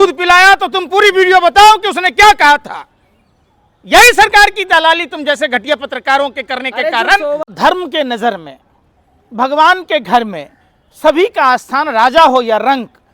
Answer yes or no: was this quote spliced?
yes